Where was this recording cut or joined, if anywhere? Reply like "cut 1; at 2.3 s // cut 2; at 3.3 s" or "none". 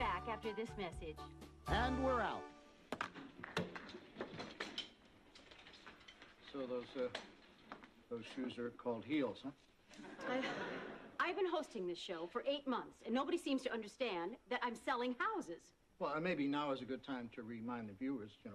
none